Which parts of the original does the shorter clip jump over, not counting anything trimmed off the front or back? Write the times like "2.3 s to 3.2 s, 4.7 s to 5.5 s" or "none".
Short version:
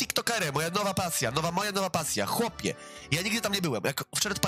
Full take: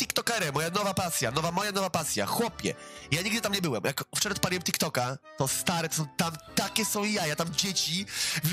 none